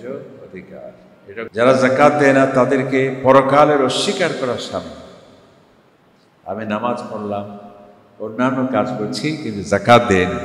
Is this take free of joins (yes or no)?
no